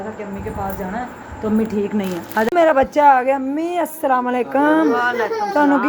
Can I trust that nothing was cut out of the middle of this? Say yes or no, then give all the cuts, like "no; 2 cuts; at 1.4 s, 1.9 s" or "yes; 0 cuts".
no; 1 cut; at 2.5 s